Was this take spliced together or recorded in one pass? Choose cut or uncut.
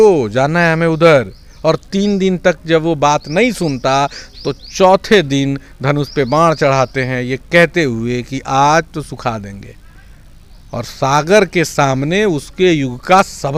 uncut